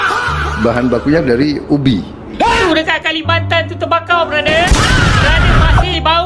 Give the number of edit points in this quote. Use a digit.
1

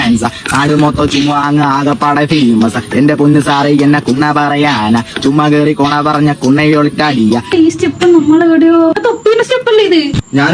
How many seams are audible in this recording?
1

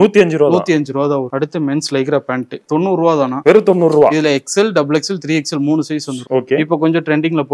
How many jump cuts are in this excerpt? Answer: 3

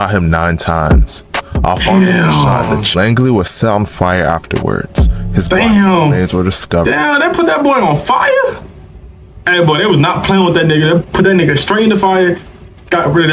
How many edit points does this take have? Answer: 1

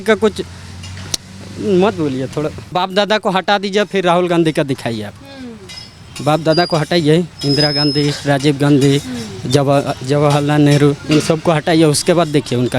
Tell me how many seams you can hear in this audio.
1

